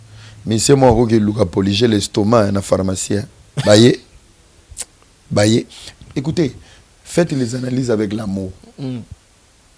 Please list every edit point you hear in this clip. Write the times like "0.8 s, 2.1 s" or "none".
none